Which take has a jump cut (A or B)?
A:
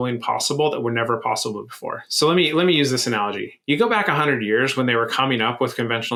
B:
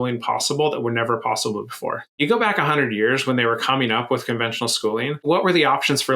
B